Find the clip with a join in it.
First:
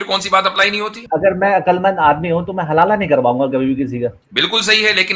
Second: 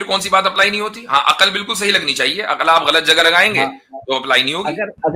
first; 2 cuts; at 1.0 s, 4.2 s

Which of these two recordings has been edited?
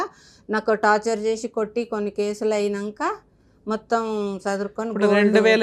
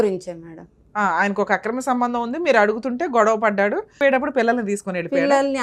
second; 1 cut; at 4.0 s

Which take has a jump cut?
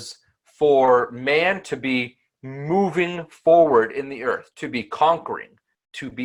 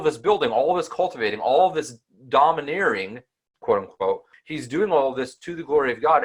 second; 1 cut; at 4.3 s

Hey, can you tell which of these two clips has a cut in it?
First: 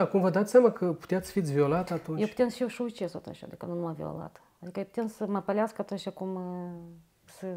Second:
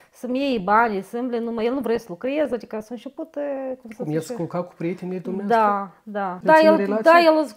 second; 1 cut; at 6.4 s

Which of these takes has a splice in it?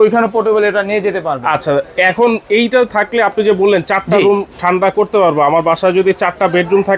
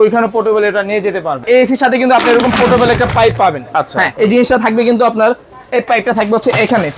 second; 2 cuts; at 1.4 s, 4.1 s

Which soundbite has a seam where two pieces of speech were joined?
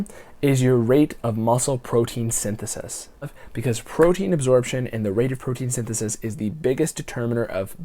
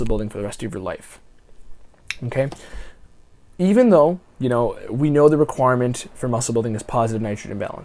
first; 1 cut; at 3.3 s

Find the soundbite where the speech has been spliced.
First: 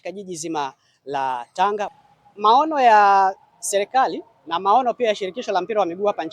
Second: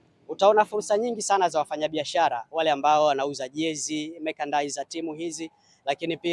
first; 1 cut; at 1.9 s

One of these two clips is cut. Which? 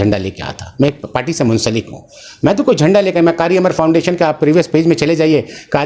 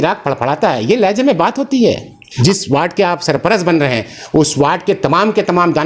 second; 1 cut; at 2.3 s

